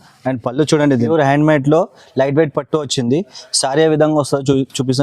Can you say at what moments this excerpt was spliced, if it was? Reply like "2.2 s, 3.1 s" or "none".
1.1 s